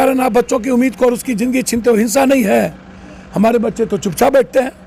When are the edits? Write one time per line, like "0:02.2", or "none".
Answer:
none